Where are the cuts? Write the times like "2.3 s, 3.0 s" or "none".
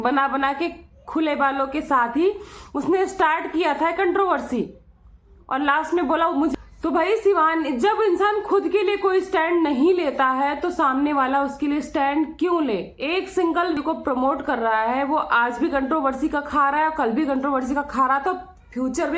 6.5 s, 13.8 s